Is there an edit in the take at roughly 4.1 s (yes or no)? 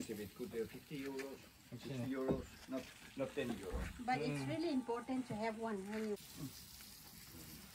no